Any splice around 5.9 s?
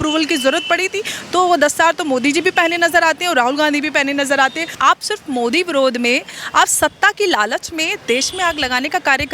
no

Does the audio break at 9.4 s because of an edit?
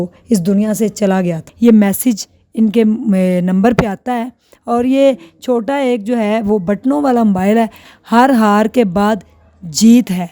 no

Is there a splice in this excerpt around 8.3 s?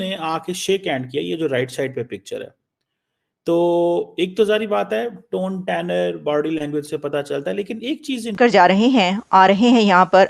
yes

